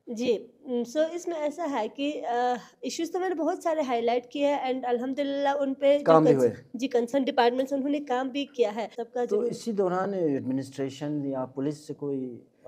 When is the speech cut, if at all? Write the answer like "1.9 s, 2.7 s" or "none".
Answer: 9.0 s